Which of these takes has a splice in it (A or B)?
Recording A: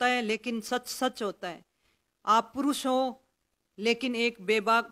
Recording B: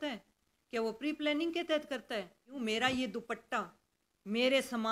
B